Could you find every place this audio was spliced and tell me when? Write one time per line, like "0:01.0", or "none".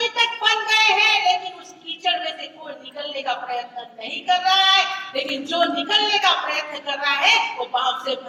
none